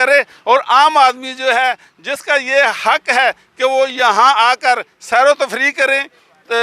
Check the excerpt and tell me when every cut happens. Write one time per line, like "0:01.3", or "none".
none